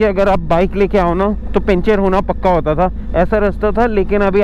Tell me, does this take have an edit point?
no; 0 cuts

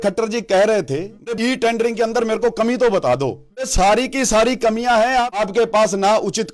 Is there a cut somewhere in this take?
yes; 3 cuts; at 1.3 s, 3.7 s, 5.4 s

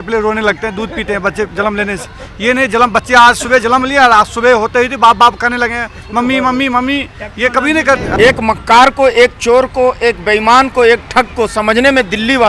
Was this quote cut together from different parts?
yes; 1 cut; at 8.1 s

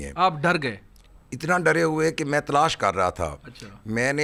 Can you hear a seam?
no; 0 cuts

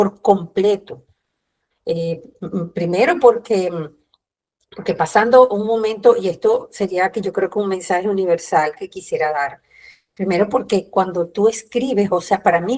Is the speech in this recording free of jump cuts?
yes; 0 cuts

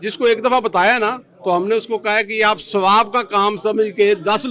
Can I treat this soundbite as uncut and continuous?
yes; 0 cuts

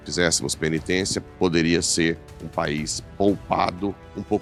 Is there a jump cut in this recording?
no; 0 cuts

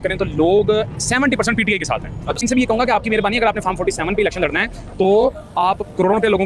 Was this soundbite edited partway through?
yes; 1 cut; at 2.4 s

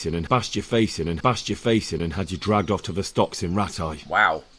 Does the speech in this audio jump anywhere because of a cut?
no; 0 cuts

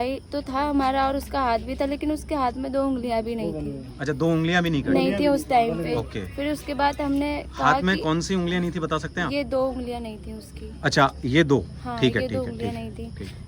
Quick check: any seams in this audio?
no; 0 cuts

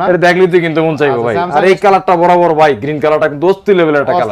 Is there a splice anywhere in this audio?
no; 0 cuts

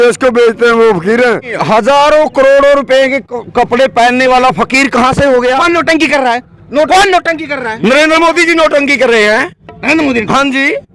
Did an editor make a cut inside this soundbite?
yes; 2 cuts; at 1.5 s, 5.6 s

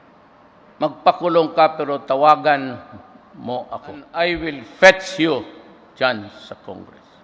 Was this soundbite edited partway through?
yes; 1 cut; at 4.1 s

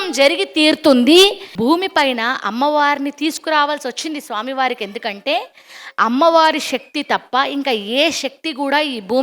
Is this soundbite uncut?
no; 1 cut; at 1.5 s

